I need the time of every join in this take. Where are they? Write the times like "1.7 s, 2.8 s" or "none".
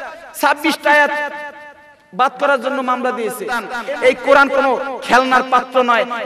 3.8 s

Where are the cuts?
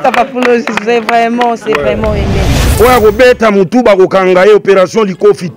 2.6 s

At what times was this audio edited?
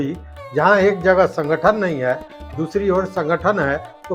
none

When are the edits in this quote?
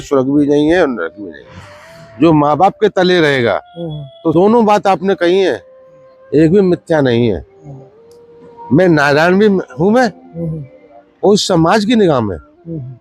4.3 s

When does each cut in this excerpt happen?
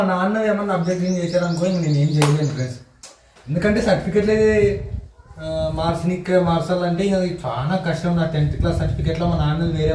none

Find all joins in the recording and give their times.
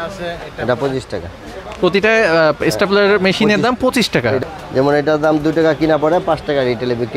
4.4 s

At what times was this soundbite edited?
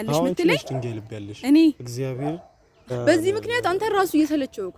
2.9 s

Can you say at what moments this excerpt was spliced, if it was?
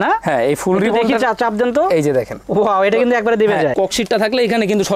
3.7 s

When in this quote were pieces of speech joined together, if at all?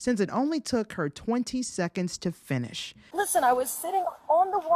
3.1 s

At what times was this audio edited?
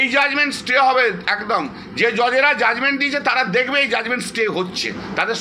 none

